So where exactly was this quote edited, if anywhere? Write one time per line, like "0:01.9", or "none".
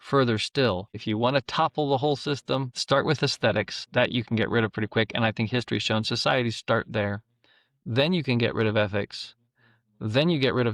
0:01.0
0:02.7
0:03.8